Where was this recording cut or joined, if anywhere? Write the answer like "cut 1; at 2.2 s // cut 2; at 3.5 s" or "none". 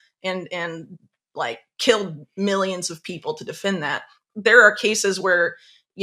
cut 1; at 4.2 s